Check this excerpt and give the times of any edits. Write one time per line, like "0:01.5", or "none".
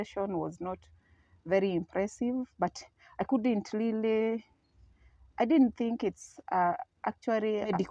none